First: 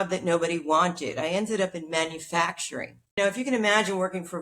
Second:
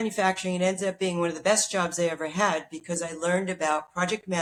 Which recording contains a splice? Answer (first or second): first